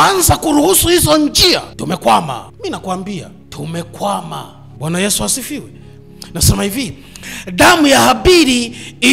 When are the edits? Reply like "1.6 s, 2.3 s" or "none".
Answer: 1.7 s, 2.5 s, 3.4 s, 4.6 s